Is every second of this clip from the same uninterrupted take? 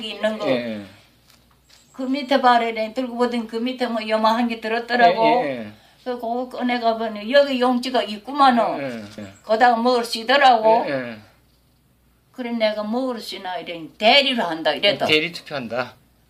yes; 0 cuts

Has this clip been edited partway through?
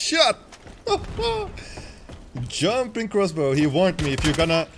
no; 0 cuts

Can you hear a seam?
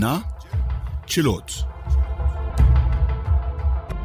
no; 0 cuts

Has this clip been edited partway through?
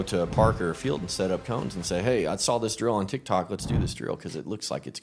no; 0 cuts

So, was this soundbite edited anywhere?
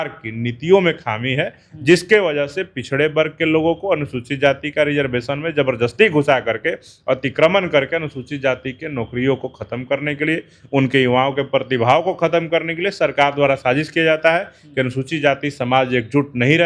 no; 0 cuts

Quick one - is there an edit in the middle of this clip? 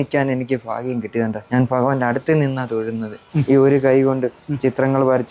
yes; 2 cuts; at 1.4 s, 3.3 s

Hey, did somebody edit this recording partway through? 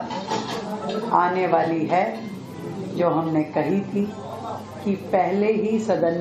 no; 0 cuts

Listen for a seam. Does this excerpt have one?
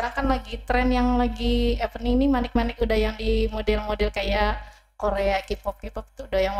no; 0 cuts

